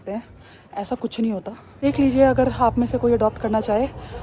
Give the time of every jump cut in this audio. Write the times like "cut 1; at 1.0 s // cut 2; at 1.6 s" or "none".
cut 1; at 1.8 s